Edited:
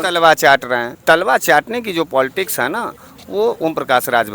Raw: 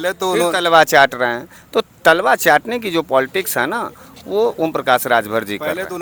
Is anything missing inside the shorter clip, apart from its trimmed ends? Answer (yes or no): yes